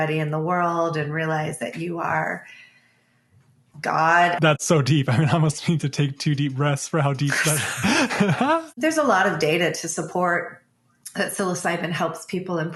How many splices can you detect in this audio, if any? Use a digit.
2